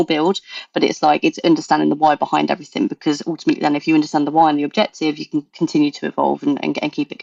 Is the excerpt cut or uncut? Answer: uncut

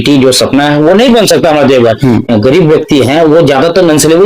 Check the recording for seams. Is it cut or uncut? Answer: cut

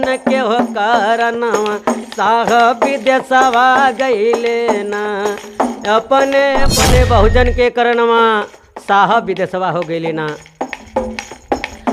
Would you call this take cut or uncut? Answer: cut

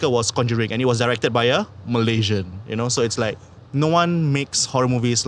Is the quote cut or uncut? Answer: cut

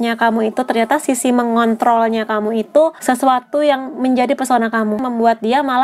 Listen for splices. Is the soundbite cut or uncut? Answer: cut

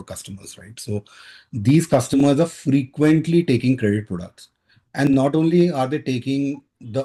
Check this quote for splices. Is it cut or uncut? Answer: uncut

